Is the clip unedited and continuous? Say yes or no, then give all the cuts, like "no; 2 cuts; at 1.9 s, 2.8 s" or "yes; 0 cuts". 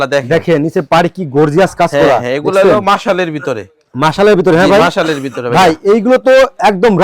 yes; 0 cuts